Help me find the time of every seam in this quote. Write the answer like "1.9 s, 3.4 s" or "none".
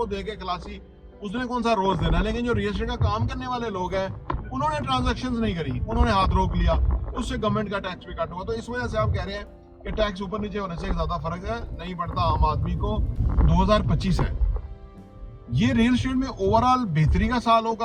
13.2 s

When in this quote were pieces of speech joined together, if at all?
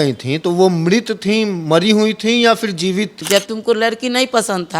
3.2 s

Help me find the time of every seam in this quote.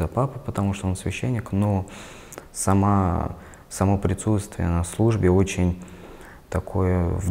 none

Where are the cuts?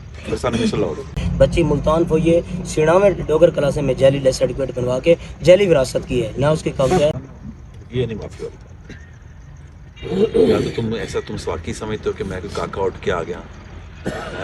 1.2 s, 7.1 s

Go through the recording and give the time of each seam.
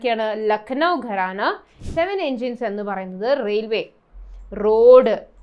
1.7 s

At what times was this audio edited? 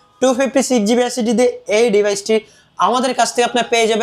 none

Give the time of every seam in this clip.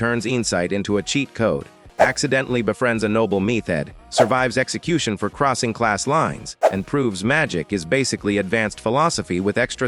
none

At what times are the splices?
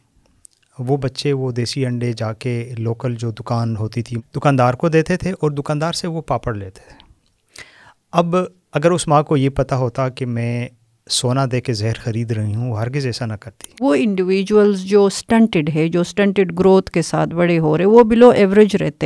4.1 s, 13.8 s

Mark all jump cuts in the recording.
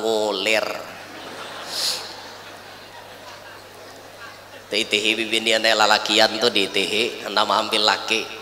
none

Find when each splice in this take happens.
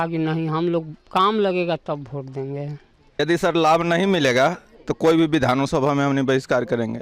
3.2 s

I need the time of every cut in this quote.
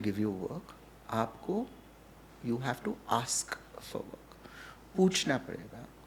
none

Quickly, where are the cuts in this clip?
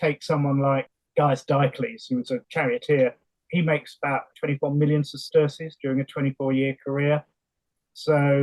0.9 s, 2.5 s, 3.3 s, 4.3 s

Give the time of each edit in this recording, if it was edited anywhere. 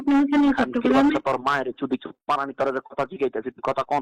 none

